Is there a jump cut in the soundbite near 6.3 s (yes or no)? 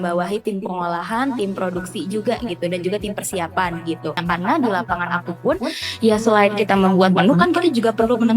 no